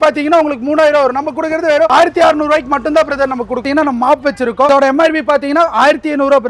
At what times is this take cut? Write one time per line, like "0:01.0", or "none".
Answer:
0:01.9
0:03.6
0:04.7